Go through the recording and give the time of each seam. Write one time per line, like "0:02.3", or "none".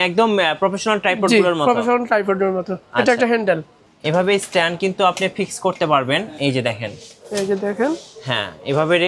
0:03.8